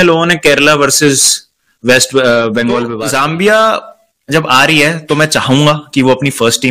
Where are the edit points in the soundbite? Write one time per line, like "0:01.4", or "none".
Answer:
0:03.0